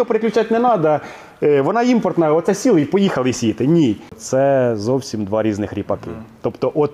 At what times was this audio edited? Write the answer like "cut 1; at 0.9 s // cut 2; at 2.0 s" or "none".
cut 1; at 4.2 s

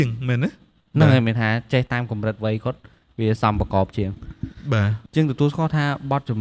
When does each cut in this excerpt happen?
cut 1; at 5.0 s

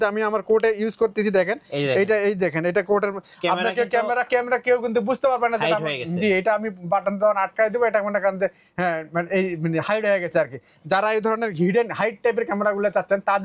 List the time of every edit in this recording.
none

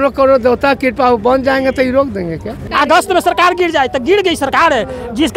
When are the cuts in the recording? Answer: cut 1; at 2.6 s

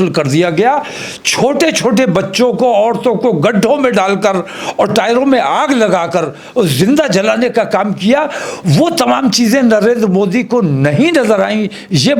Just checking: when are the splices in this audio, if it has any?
none

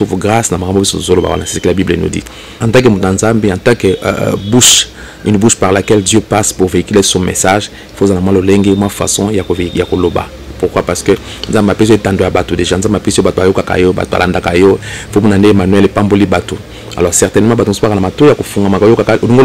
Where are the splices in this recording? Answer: cut 1; at 2.4 s

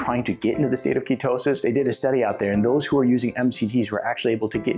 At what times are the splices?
cut 1; at 1.6 s

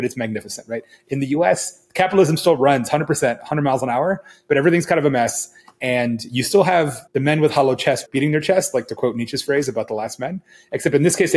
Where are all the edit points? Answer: cut 1; at 7.0 s // cut 2; at 8.0 s

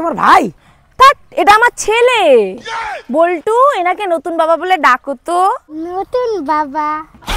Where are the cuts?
none

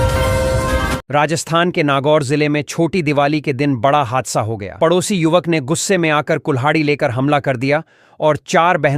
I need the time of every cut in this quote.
cut 1; at 1.0 s

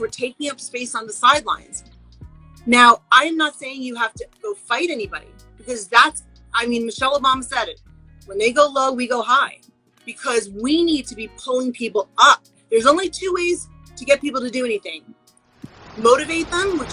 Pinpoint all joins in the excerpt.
none

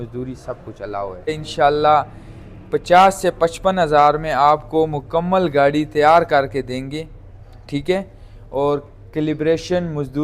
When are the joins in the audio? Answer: cut 1; at 1.4 s

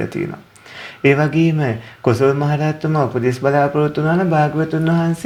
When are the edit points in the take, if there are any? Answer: none

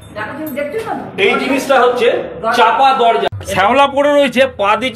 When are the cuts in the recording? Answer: cut 1; at 3.3 s

